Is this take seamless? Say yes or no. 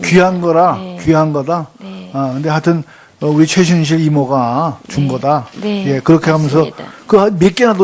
yes